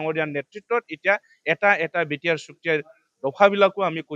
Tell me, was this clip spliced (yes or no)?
no